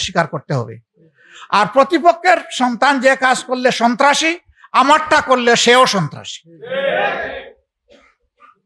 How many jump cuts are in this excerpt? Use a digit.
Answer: 0